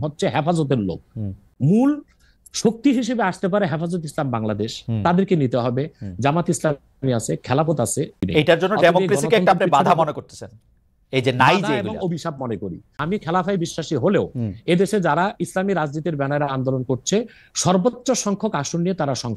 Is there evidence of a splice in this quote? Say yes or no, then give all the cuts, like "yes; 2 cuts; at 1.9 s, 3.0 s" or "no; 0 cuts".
yes; 3 cuts; at 1.4 s, 8.2 s, 13.0 s